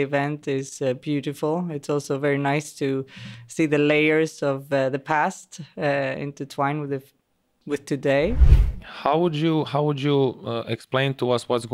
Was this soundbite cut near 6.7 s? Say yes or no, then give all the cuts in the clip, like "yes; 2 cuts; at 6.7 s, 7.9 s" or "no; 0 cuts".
no; 1 cut; at 8.4 s